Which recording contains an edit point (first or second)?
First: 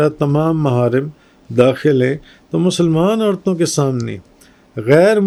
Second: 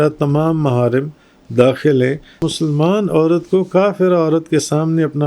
second